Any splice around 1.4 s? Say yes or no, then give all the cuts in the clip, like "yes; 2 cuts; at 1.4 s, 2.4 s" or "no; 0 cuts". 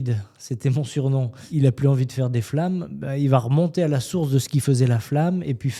yes; 1 cut; at 1.4 s